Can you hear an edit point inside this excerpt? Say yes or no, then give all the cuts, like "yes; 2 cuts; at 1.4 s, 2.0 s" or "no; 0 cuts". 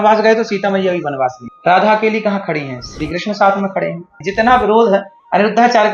yes; 2 cuts; at 1.5 s, 4.2 s